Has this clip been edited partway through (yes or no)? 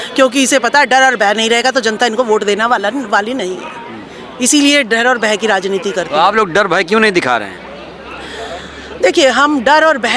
no